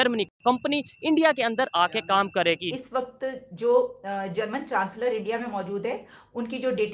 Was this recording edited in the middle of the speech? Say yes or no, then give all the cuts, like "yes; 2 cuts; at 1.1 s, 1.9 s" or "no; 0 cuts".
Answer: yes; 1 cut; at 2.8 s